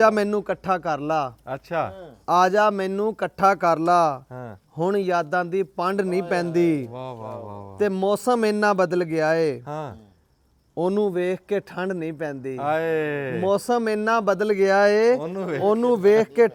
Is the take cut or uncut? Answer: uncut